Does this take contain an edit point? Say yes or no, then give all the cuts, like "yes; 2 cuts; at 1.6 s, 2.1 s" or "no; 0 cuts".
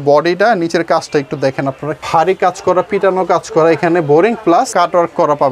yes; 2 cuts; at 2.0 s, 4.7 s